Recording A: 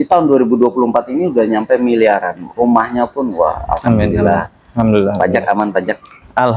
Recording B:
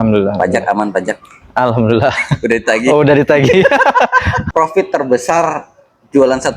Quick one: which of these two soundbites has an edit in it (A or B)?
B